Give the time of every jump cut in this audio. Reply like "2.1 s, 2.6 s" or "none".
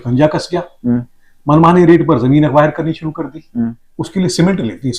3.9 s